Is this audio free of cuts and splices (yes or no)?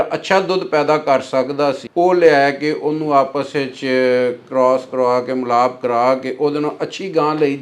no